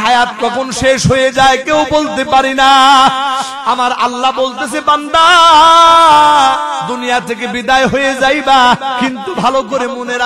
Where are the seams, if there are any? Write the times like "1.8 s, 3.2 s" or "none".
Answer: 3.5 s, 6.9 s, 9.0 s

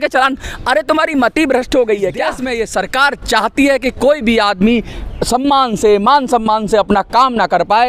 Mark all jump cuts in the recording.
2.4 s

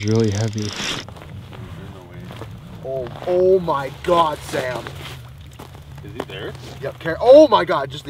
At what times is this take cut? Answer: 1.0 s

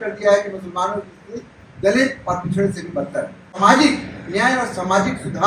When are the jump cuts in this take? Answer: 3.5 s

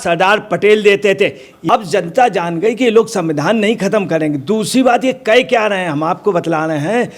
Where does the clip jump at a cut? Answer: 1.6 s

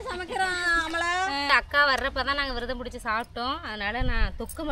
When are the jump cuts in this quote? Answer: 1.5 s

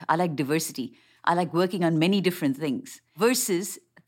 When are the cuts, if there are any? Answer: 3.1 s

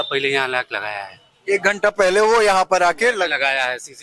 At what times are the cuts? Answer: none

